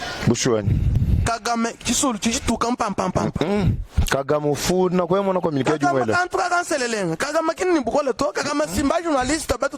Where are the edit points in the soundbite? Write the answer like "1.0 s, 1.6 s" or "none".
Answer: 0.9 s